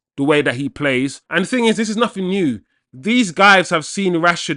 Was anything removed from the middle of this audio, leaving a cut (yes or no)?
yes